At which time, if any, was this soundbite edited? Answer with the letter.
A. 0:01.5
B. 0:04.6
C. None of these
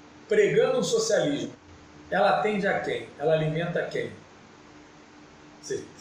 A